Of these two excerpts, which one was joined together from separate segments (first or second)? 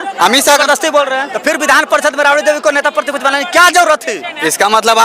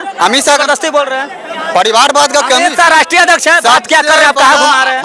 first